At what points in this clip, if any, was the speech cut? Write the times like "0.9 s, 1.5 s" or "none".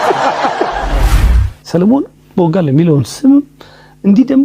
1.2 s

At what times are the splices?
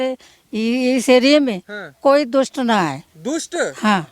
2.0 s

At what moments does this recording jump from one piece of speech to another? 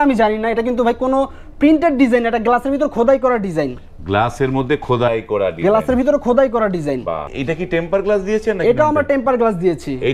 7.3 s

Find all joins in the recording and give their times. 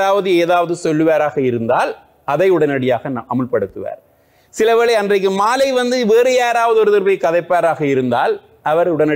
none

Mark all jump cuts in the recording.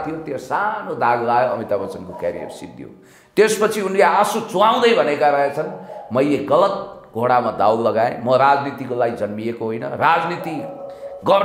none

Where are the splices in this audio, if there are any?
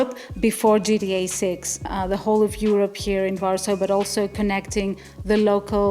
1.9 s

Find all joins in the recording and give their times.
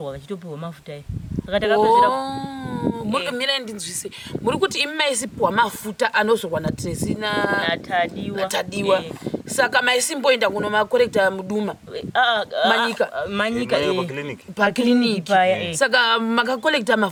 none

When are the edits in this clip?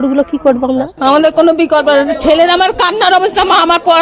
0.9 s

